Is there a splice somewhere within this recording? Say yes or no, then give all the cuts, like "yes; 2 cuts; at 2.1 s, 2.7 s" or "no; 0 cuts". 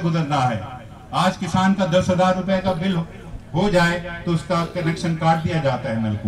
no; 0 cuts